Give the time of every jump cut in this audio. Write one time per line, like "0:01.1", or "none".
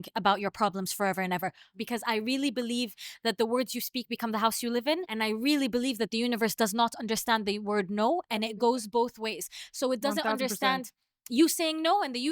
0:01.7
0:05.1